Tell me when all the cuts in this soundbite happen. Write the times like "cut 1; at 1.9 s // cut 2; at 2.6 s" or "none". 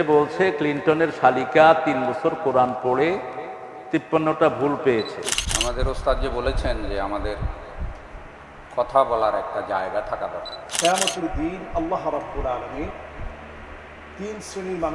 cut 1; at 5.4 s // cut 2; at 10.6 s